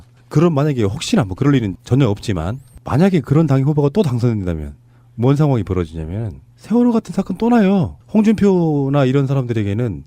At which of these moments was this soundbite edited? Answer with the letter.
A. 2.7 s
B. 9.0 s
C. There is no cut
A